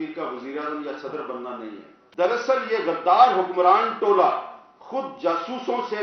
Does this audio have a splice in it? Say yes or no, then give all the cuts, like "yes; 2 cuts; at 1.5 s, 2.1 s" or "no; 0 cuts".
yes; 1 cut; at 2.1 s